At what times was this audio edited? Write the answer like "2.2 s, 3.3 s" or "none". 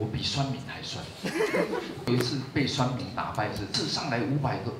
2.1 s, 3.7 s